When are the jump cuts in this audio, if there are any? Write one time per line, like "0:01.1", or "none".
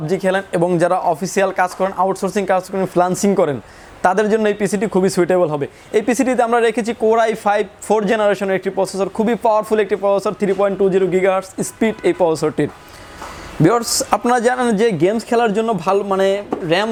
none